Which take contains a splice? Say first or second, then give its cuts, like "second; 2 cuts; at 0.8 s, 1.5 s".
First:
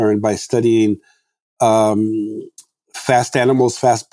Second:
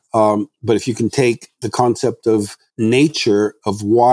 second; 1 cut; at 2.6 s